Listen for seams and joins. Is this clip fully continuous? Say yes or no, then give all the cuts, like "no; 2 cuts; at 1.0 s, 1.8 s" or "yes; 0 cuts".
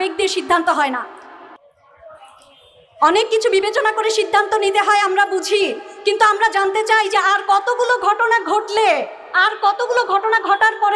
yes; 0 cuts